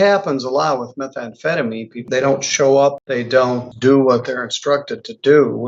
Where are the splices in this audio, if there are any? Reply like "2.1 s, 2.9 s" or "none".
2.0 s, 3.5 s